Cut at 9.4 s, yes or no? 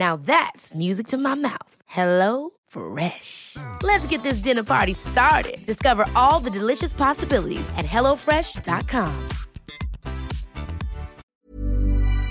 no